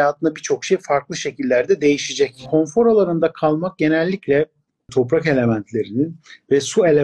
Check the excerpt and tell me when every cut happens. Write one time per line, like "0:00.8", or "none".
0:02.4
0:04.9